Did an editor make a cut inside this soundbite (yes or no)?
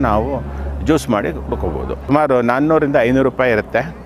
yes